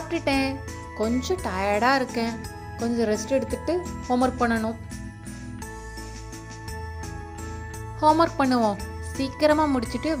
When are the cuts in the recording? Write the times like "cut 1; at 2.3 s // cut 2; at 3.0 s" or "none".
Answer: cut 1; at 4.8 s // cut 2; at 7.4 s

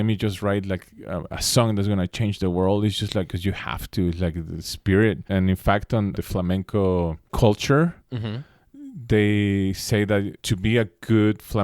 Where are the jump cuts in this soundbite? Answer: cut 1; at 3.3 s // cut 2; at 5.3 s // cut 3; at 6.2 s // cut 4; at 7.3 s // cut 5; at 10.4 s

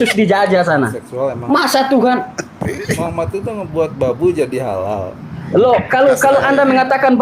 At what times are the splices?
cut 1; at 2.7 s

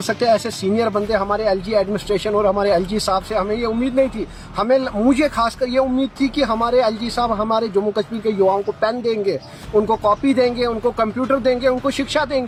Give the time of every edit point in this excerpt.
none

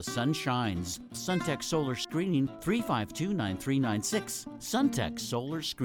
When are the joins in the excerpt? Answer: cut 1; at 1.2 s // cut 2; at 2.5 s

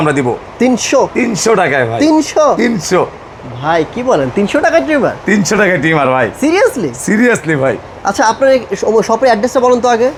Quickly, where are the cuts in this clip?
none

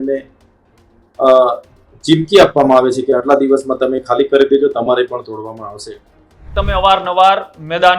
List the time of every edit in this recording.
cut 1; at 6.5 s

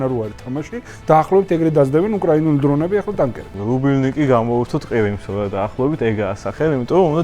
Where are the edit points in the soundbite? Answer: cut 1; at 3.5 s

